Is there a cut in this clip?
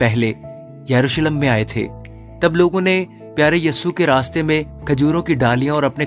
no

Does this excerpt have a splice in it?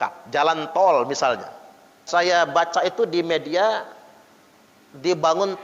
yes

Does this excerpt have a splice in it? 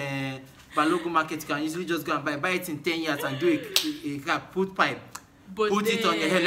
no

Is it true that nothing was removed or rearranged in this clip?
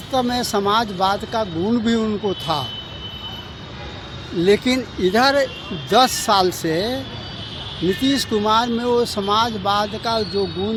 yes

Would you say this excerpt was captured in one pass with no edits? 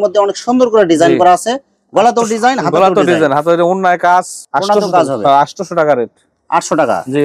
yes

